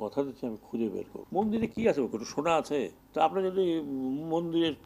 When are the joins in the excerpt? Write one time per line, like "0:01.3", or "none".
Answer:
0:01.1
0:03.0